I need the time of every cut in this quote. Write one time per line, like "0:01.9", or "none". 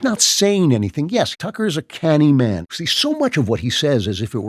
0:01.4
0:02.7